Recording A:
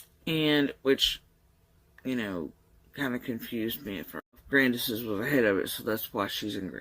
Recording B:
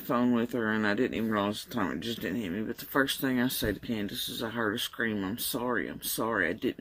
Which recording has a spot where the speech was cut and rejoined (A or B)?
A